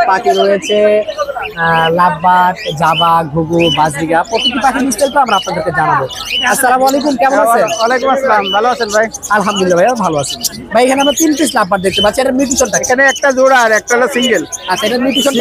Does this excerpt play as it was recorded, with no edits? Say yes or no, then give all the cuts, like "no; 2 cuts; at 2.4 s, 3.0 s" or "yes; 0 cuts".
yes; 0 cuts